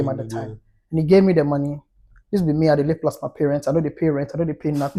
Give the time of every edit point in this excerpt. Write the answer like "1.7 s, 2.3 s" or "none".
none